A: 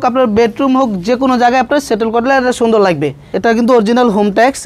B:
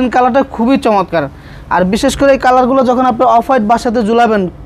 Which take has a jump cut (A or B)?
A